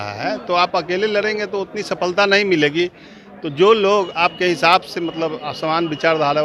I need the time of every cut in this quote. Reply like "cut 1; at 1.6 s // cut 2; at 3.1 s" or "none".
none